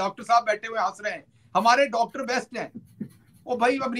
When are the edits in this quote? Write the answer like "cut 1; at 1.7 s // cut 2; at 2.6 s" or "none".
none